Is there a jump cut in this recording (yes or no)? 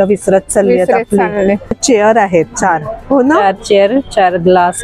yes